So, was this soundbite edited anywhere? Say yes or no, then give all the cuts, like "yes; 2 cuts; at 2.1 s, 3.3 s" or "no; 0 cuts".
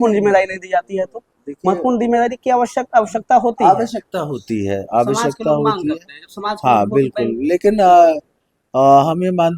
no; 0 cuts